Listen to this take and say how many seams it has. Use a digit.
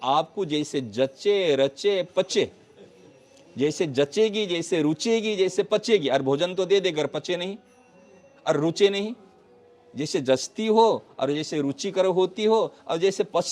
0